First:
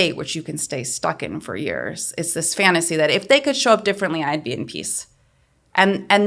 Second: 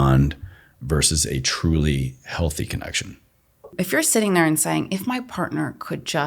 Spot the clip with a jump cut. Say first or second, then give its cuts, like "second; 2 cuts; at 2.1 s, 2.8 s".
second; 1 cut; at 3.7 s